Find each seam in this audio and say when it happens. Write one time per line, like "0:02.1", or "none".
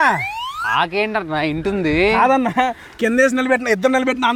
none